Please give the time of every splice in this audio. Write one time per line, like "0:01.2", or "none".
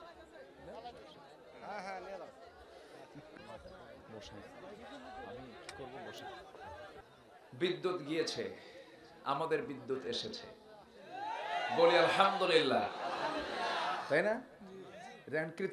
none